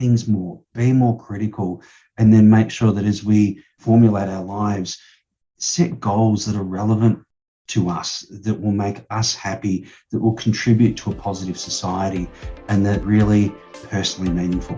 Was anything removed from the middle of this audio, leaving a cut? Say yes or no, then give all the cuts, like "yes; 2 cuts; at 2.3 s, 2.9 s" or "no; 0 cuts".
yes; 3 cuts; at 3.8 s, 13.0 s, 13.8 s